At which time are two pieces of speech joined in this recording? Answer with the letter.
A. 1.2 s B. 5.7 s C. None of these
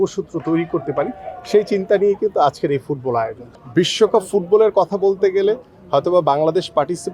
C